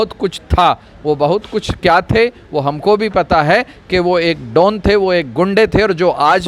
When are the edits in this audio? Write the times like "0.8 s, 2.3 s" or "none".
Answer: none